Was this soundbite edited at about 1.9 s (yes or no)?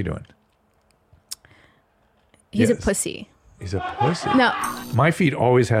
no